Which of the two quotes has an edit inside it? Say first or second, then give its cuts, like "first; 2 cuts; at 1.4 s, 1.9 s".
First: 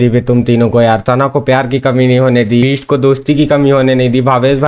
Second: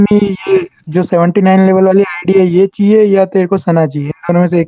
first; 2 cuts; at 1.0 s, 2.6 s